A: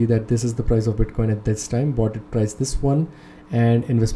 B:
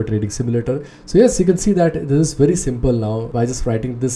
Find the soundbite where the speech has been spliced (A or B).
B